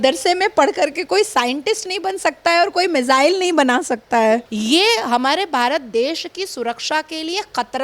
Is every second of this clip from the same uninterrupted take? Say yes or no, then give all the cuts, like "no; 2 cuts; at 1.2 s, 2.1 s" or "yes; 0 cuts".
no; 1 cut; at 4.5 s